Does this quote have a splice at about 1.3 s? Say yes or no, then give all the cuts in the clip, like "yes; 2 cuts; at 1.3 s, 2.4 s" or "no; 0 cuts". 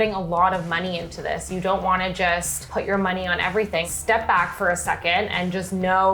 no; 2 cuts; at 2.6 s, 3.9 s